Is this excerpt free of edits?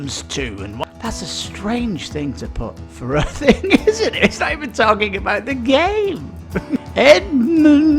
no; 2 cuts; at 0.8 s, 6.9 s

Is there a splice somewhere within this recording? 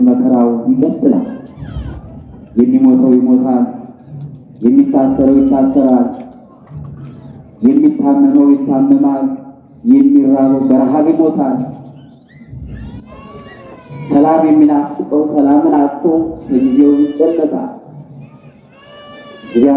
no; 0 cuts

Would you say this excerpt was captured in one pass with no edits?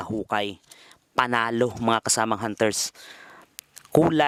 yes; 0 cuts

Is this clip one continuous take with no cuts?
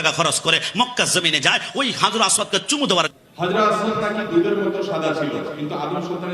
no; 1 cut; at 3.1 s

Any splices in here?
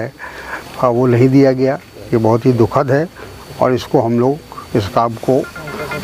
no; 0 cuts

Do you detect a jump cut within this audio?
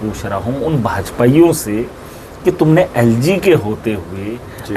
no; 0 cuts

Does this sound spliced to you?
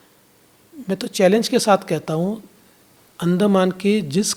no; 0 cuts

